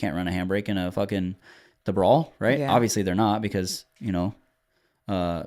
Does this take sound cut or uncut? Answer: uncut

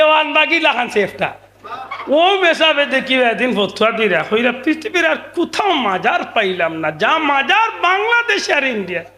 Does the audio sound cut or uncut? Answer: uncut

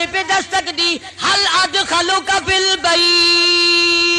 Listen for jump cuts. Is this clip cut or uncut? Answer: uncut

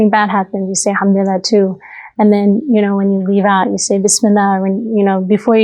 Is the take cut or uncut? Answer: uncut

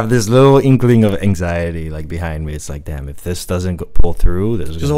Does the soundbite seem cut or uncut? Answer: uncut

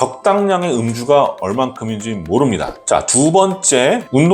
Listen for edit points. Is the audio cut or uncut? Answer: cut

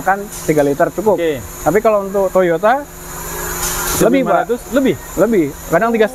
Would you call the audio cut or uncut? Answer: uncut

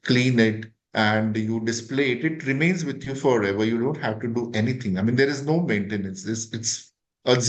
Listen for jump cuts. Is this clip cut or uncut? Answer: uncut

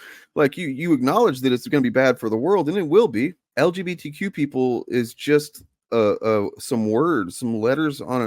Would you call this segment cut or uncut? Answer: cut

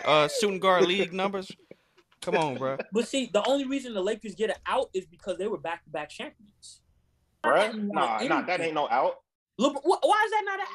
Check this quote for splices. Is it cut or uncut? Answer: cut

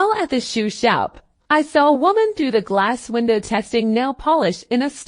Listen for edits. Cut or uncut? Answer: cut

